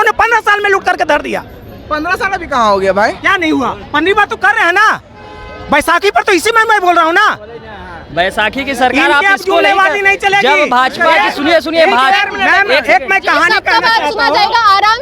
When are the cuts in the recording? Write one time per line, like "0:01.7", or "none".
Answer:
none